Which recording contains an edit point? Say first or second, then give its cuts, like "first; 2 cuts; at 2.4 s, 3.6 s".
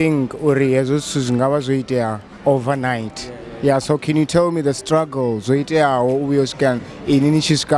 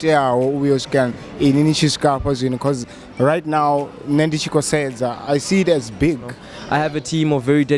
second; 1 cut; at 6.5 s